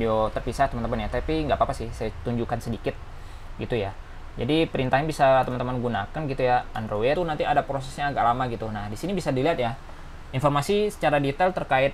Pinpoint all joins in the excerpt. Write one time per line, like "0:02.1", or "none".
0:07.2